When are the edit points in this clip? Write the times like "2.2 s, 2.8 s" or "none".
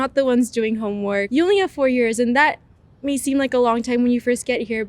1.2 s